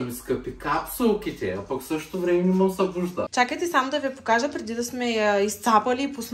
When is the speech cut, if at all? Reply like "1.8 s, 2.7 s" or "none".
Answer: 3.3 s

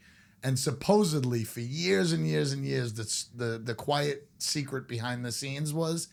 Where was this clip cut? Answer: none

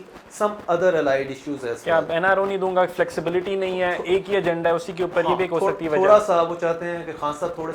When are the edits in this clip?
none

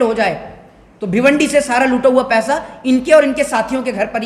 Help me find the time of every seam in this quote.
none

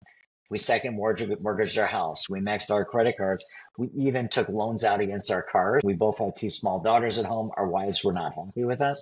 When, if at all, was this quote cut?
2.2 s, 5.8 s

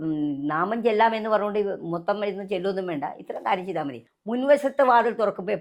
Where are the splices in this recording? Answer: 4.1 s

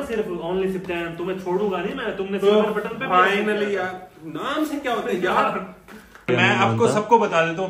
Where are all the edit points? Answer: 6.3 s

